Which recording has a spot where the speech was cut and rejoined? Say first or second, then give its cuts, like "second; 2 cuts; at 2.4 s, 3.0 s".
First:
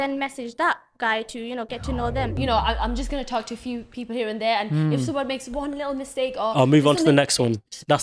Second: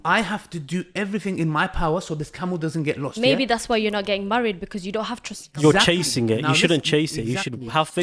first; 1 cut; at 2.4 s